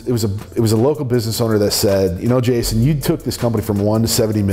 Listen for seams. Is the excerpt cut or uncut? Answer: uncut